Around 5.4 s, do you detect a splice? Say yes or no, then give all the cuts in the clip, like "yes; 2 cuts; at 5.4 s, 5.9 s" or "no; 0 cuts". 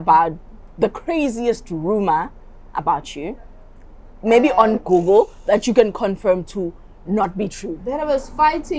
no; 0 cuts